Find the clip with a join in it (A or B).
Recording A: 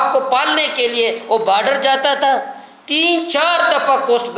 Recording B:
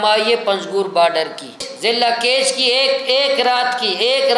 B